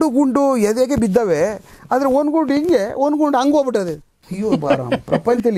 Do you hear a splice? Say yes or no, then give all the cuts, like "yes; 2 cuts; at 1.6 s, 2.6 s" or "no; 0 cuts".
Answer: no; 0 cuts